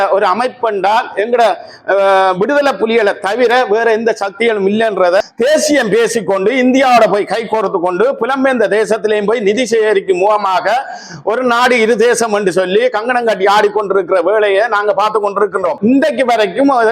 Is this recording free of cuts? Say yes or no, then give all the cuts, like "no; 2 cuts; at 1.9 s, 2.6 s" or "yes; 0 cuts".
no; 2 cuts; at 5.2 s, 15.7 s